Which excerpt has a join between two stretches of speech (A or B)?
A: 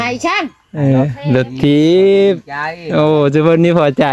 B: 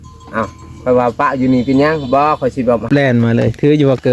B